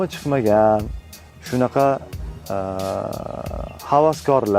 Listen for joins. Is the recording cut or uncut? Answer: uncut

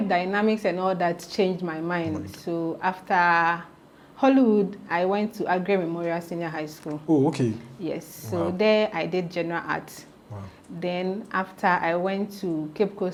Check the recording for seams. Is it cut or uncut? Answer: uncut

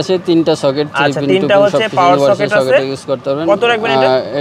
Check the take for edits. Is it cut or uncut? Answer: uncut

